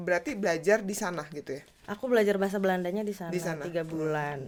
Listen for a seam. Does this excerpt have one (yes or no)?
no